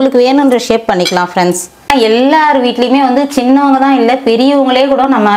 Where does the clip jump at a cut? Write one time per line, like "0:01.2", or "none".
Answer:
0:01.7